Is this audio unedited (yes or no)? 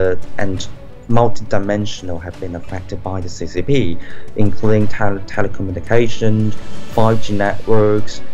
yes